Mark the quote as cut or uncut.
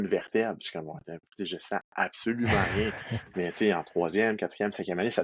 uncut